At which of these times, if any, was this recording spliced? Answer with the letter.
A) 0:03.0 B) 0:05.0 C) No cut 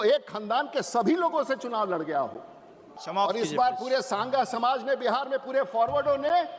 A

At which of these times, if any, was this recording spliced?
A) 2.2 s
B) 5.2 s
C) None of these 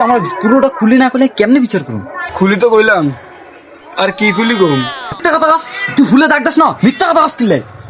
B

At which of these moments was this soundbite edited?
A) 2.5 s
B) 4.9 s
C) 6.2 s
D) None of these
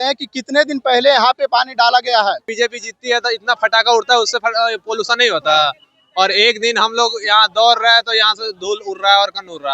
A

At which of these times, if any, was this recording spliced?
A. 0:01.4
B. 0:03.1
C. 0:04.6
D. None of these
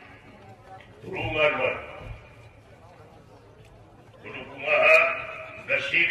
D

